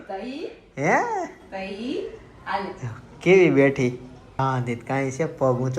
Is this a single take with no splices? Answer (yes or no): yes